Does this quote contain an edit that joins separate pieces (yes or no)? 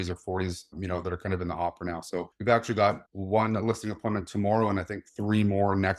no